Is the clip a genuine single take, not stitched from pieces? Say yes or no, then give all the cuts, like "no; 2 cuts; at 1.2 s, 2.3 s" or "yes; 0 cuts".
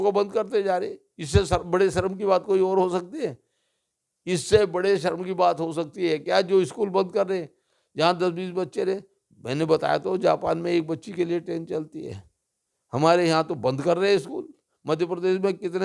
yes; 0 cuts